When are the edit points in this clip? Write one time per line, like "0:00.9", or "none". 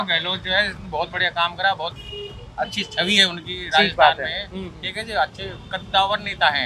none